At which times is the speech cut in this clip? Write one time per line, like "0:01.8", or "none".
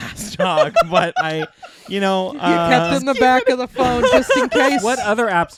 none